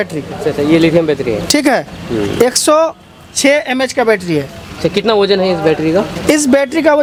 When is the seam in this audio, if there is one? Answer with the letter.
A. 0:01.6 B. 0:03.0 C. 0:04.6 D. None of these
D